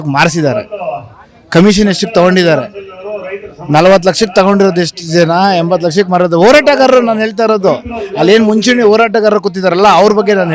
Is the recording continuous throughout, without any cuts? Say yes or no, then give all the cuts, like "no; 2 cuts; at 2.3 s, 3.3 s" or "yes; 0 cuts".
yes; 0 cuts